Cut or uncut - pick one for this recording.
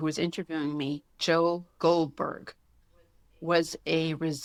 uncut